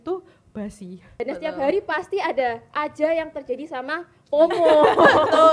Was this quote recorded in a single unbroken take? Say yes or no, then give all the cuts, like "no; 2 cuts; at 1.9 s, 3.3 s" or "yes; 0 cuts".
no; 1 cut; at 1.2 s